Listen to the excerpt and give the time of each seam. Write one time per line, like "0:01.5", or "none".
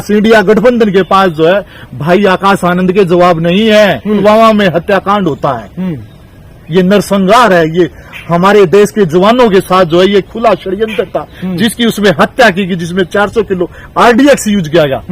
0:04.1

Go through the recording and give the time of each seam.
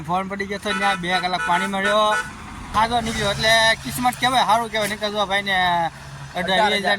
0:02.6

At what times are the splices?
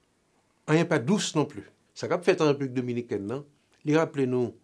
0:01.9

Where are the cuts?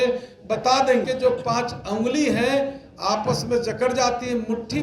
0:01.0

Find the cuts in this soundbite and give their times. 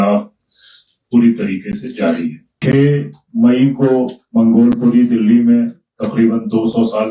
0:02.5

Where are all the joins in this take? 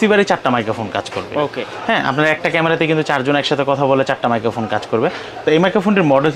none

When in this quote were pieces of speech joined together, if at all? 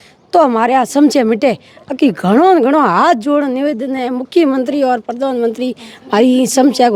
none

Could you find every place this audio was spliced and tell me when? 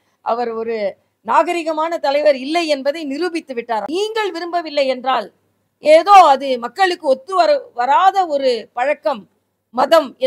0:03.9

